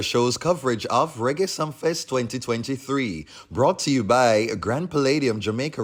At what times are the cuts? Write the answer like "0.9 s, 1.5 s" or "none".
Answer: none